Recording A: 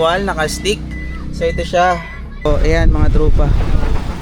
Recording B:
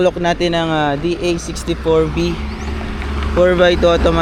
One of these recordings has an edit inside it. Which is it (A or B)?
A